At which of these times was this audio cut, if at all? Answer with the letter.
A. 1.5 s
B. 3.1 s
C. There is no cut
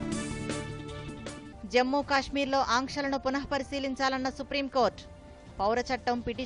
A